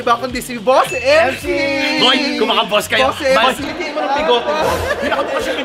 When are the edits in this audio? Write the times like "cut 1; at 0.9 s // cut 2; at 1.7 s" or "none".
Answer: cut 1; at 3.6 s

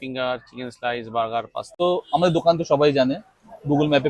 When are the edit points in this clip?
cut 1; at 1.8 s

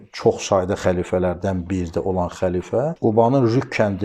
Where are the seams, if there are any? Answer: cut 1; at 2.9 s

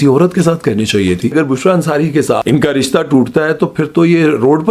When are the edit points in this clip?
cut 1; at 1.3 s // cut 2; at 2.4 s

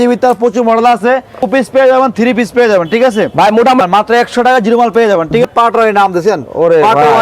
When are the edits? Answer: cut 1; at 1.5 s // cut 2; at 3.8 s // cut 3; at 5.4 s

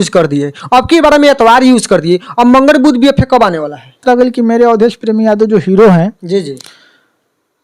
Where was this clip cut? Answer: cut 1; at 4.0 s

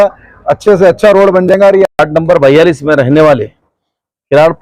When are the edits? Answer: cut 1; at 1.9 s

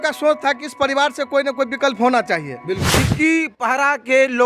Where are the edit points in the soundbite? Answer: cut 1; at 2.8 s

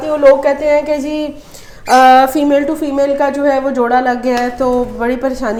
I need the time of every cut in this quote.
none

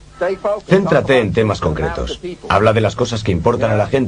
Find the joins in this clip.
cut 1; at 2.7 s

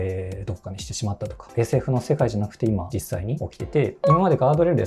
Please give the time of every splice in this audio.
cut 1; at 1.5 s // cut 2; at 4.0 s

